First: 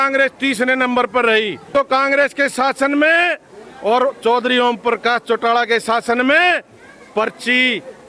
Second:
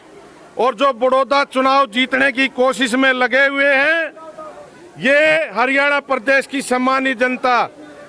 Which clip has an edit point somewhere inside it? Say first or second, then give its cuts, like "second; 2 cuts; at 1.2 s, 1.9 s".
first; 1 cut; at 1.7 s